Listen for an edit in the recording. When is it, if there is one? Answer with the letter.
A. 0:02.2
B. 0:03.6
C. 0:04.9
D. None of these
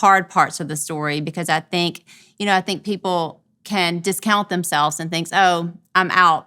A